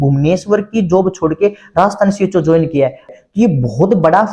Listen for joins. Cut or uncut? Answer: cut